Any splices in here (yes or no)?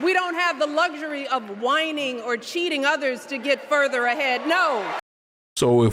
no